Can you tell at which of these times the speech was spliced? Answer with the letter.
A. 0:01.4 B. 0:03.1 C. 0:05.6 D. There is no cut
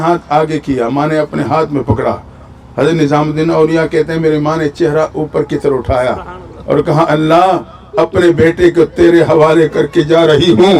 D